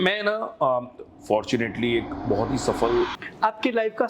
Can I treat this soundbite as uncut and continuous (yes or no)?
no